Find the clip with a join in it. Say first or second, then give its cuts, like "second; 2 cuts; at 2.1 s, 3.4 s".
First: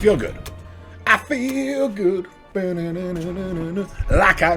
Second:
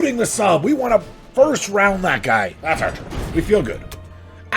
second; 1 cut; at 2.6 s